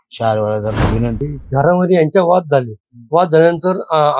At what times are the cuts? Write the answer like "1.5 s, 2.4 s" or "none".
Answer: 1.4 s